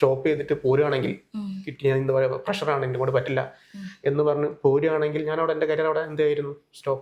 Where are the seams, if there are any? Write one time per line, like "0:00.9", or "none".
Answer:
none